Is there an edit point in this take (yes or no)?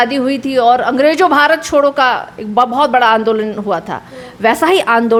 no